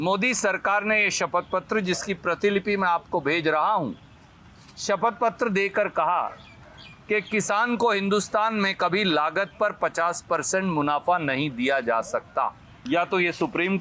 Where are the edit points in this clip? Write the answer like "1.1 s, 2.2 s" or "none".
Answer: 12.7 s

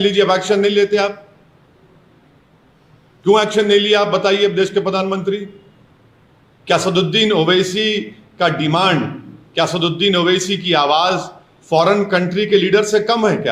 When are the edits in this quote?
none

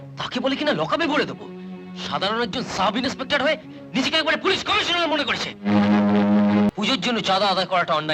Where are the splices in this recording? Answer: 6.7 s

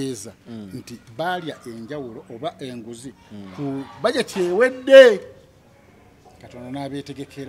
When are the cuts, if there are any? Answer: none

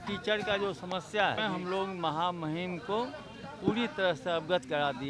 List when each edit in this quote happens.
1.4 s

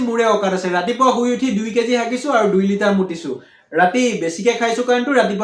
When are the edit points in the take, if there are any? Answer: none

